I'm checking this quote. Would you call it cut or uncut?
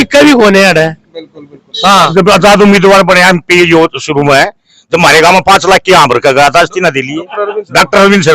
cut